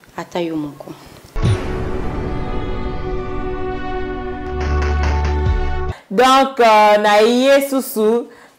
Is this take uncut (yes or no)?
no